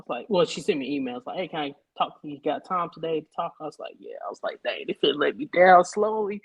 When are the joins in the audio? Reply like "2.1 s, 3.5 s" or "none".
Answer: none